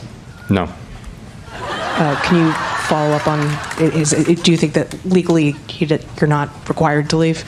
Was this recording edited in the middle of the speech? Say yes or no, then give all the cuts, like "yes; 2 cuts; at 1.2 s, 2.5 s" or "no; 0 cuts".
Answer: no; 0 cuts